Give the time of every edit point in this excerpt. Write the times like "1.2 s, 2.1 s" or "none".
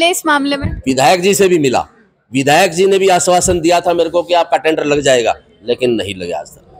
none